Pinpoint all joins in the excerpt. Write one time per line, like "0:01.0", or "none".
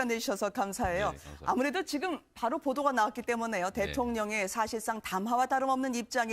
none